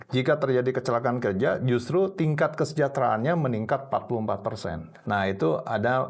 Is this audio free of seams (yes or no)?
no